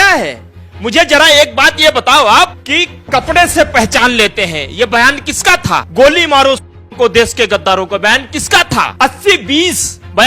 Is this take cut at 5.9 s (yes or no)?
yes